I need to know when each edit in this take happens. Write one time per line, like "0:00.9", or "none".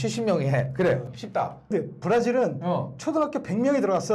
0:01.7